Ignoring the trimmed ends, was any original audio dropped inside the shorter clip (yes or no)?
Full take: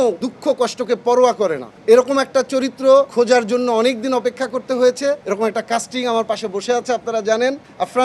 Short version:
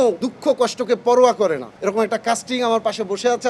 yes